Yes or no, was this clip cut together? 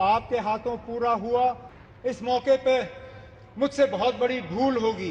yes